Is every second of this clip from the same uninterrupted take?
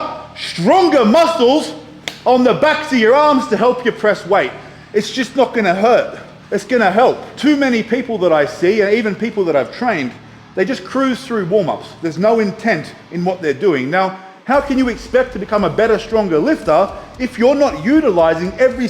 no; 1 cut; at 7.3 s

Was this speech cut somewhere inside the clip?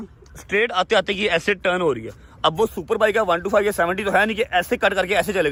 no; 0 cuts

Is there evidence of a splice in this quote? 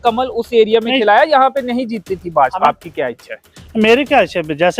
yes; 1 cut; at 2.7 s

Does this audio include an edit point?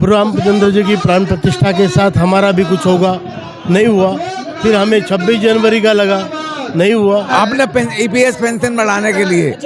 yes; 1 cut; at 7.3 s

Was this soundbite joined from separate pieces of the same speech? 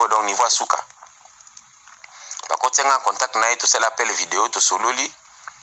no; 0 cuts

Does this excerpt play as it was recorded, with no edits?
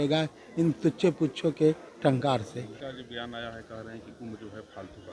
no; 1 cut; at 2.8 s

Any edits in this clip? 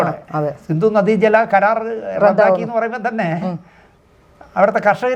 no; 0 cuts

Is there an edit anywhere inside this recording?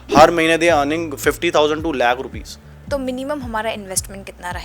yes; 1 cut; at 2.7 s

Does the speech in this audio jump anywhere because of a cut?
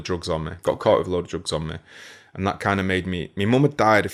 no; 0 cuts

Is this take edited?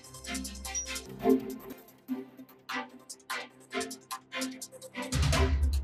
no; 0 cuts

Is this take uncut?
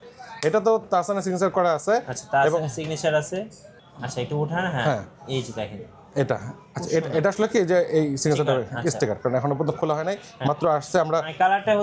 yes; 0 cuts

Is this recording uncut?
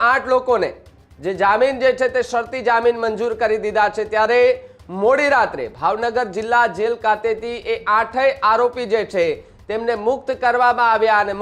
yes; 0 cuts

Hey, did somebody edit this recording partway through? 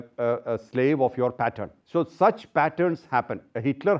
yes; 1 cut; at 1.7 s

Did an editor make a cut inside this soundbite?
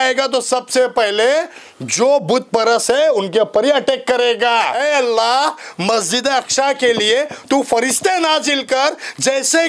yes; 1 cut; at 4.7 s

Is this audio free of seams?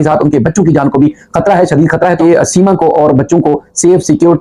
no; 1 cut; at 2.2 s

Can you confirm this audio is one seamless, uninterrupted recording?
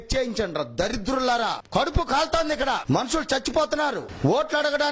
no; 3 cuts; at 1.6 s, 2.8 s, 4.1 s

